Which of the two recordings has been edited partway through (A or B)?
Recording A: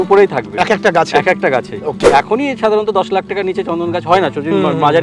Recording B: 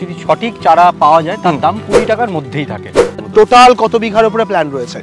B